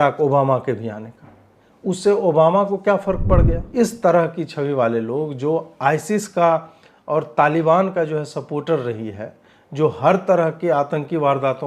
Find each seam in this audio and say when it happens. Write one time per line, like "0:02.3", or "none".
0:03.6